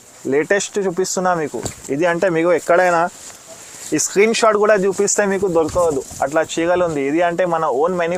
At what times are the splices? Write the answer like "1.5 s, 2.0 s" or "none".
none